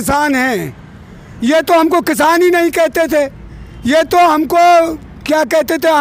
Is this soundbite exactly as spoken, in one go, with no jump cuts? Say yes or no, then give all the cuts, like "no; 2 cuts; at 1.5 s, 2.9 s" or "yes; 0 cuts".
yes; 0 cuts